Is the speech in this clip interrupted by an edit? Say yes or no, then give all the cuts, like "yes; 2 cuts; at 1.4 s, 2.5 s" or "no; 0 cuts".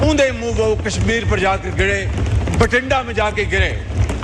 no; 0 cuts